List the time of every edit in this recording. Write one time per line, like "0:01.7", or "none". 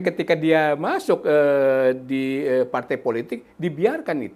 none